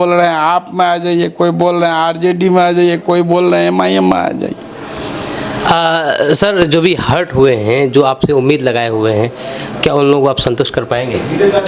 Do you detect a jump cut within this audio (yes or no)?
no